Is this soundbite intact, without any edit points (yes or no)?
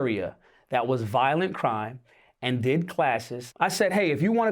no